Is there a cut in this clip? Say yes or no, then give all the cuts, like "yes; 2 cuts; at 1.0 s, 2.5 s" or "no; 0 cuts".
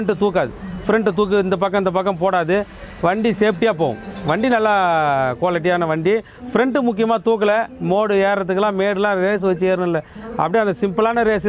no; 0 cuts